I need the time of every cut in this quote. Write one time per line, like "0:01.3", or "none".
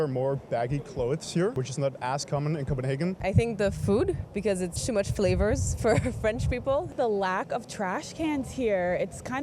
0:01.5
0:03.2
0:06.9